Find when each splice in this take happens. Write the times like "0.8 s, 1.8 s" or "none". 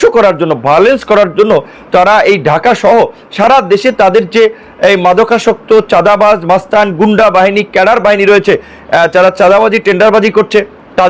none